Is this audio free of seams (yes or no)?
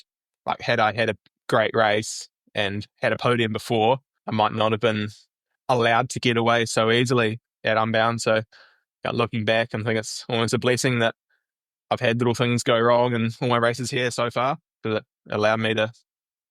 no